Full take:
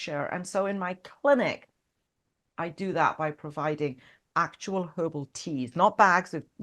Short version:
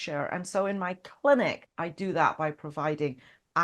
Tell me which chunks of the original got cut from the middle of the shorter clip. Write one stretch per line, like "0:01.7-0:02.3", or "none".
0:01.7-0:02.5